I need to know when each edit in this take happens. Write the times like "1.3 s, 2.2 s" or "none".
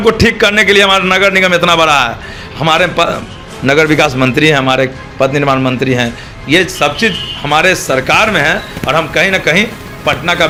none